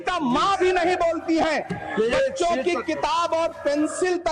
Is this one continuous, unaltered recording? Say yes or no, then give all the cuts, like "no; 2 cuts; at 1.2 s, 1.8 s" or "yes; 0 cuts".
yes; 0 cuts